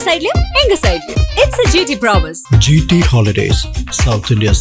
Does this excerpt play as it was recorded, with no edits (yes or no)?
yes